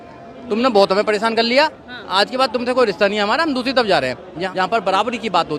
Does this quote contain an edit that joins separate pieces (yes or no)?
yes